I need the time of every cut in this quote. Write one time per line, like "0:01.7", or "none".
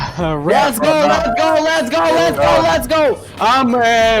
none